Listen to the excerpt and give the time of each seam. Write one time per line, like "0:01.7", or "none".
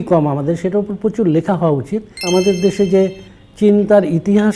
0:02.3